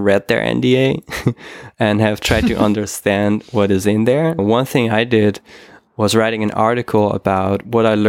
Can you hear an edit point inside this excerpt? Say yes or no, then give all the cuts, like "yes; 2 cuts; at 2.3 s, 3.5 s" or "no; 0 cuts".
yes; 1 cut; at 4.4 s